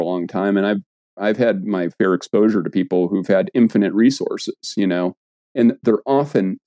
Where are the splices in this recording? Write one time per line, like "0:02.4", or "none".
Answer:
none